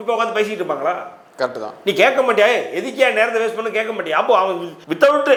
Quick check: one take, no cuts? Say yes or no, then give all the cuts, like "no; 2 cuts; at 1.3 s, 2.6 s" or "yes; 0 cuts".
yes; 0 cuts